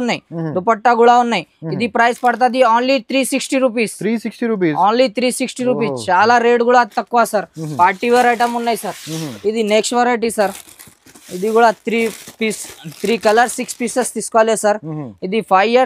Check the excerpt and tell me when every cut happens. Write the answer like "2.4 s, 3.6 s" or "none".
none